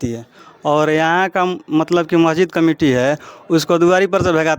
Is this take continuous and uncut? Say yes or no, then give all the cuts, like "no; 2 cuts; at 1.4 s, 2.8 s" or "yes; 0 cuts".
yes; 0 cuts